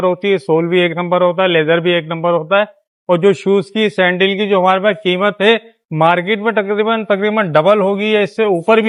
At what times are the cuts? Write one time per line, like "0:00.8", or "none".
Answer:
none